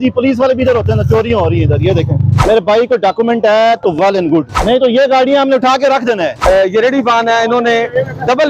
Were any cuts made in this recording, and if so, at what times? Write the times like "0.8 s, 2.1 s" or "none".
2.3 s, 4.5 s, 6.4 s